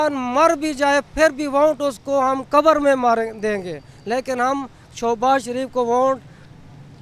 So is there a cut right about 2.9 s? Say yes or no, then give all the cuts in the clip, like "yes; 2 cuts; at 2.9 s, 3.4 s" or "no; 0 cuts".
no; 0 cuts